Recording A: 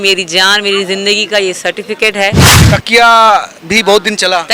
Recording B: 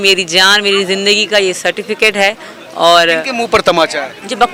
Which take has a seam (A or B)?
A